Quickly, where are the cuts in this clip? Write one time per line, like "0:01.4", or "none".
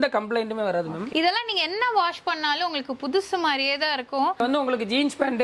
0:01.1
0:04.4